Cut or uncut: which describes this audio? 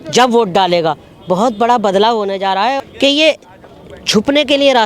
cut